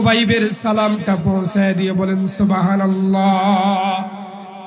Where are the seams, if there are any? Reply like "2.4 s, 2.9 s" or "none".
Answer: none